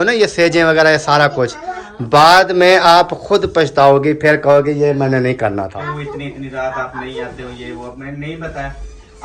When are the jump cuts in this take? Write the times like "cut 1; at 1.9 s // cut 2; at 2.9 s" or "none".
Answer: cut 1; at 5.7 s